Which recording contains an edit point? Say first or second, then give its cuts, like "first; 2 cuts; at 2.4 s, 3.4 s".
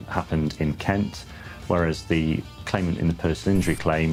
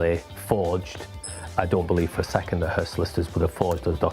second; 1 cut; at 1.5 s